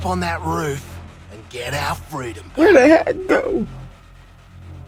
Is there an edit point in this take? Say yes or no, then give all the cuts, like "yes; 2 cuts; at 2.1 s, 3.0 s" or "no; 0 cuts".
no; 0 cuts